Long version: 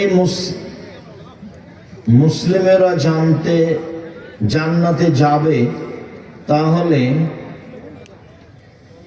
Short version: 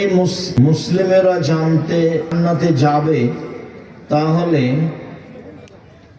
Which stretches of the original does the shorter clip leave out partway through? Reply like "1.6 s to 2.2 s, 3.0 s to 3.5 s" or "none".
0.8 s to 2.4 s, 3.9 s to 4.7 s